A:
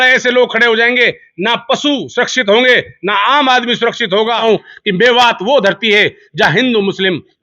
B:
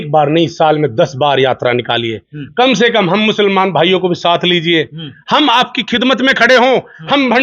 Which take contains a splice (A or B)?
A